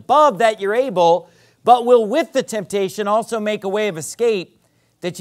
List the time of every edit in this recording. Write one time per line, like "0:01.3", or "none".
none

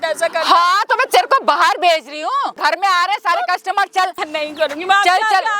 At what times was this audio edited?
0:02.6
0:04.2

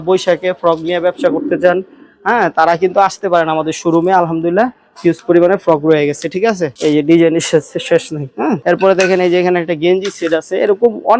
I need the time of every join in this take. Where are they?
none

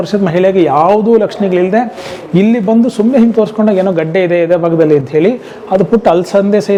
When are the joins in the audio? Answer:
none

